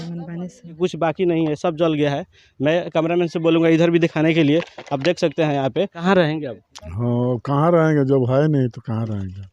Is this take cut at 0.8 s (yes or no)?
yes